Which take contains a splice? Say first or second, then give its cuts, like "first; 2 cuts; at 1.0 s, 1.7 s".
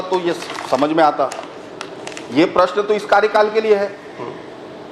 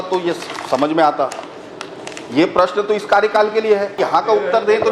second; 1 cut; at 4.0 s